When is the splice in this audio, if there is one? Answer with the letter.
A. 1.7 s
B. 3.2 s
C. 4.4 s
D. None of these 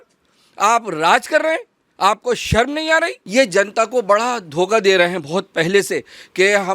B